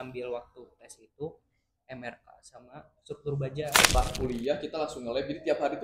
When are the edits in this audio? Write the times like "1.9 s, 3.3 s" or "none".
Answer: 4.0 s